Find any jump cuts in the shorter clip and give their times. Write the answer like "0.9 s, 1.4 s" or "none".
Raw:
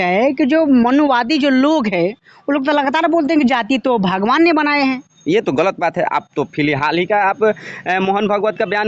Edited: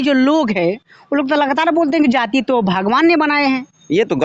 none